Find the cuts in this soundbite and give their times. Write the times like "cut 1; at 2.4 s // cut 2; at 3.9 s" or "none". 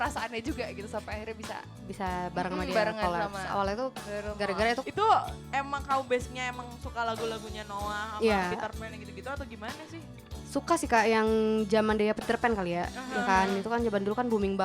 cut 1; at 4.8 s